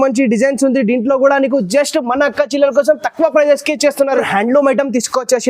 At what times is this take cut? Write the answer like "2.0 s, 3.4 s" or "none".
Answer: 4.2 s